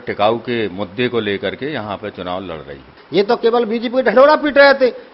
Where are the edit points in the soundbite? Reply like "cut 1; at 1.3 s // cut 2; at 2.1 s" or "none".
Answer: cut 1; at 2.9 s